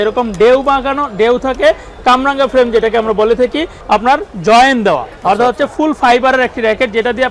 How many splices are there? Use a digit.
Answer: 1